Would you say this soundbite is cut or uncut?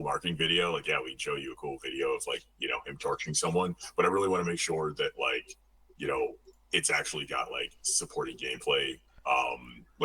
uncut